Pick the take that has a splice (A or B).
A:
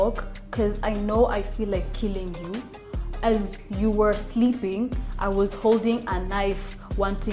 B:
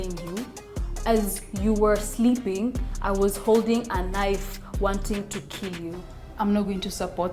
B